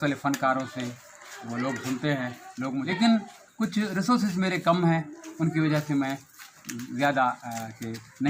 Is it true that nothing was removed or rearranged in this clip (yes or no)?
no